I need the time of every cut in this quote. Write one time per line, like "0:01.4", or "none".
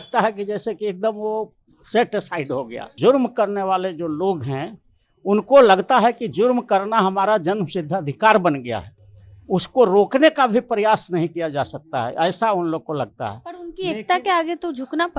0:02.9